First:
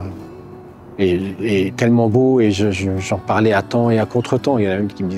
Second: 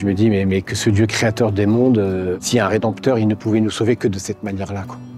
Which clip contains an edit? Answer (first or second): second